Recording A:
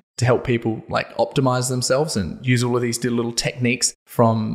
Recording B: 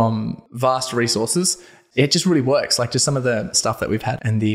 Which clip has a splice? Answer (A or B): B